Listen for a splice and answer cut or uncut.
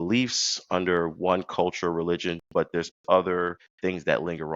cut